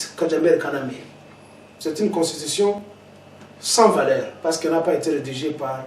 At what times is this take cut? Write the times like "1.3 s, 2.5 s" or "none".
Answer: 1.6 s

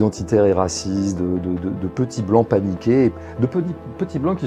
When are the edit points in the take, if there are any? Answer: 3.2 s

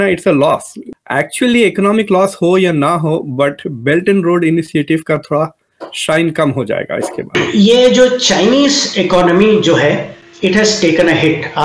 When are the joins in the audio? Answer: 7.3 s

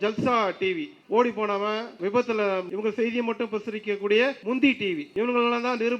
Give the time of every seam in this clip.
0.9 s, 1.9 s, 2.7 s, 4.4 s, 5.1 s

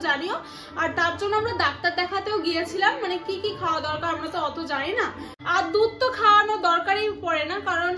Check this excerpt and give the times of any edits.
5.3 s

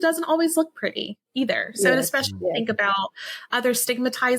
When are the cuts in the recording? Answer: none

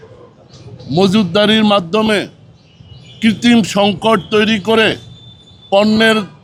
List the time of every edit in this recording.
none

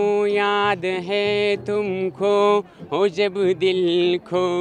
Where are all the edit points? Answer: none

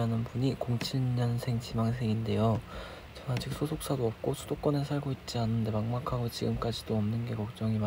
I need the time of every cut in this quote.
none

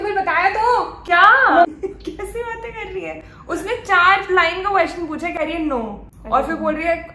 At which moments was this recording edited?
none

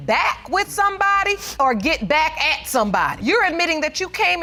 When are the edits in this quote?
none

